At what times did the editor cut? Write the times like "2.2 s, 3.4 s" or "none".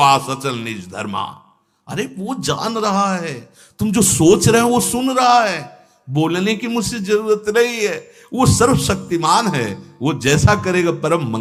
none